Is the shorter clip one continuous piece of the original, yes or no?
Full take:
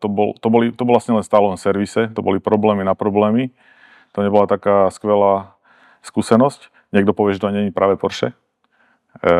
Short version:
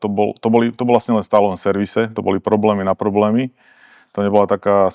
yes